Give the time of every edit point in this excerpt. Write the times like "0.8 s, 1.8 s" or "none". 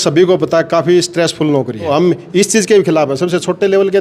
1.9 s